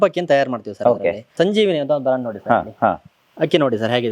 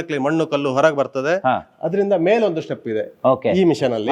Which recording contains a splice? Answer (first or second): first